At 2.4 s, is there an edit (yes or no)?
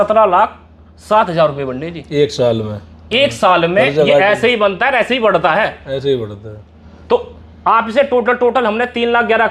no